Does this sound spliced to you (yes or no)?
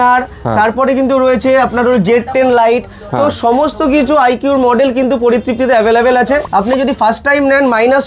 yes